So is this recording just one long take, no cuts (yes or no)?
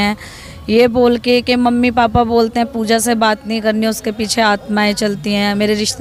yes